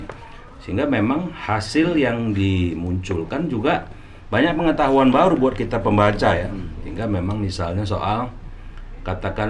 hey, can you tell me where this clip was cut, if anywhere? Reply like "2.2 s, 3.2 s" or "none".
none